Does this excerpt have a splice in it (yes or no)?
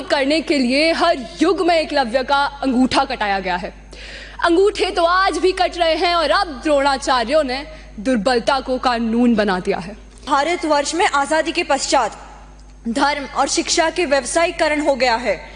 yes